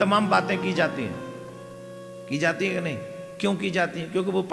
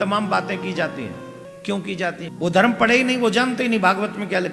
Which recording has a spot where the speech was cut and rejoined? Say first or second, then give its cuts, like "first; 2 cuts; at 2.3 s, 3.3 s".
second; 2 cuts; at 1.5 s, 2.3 s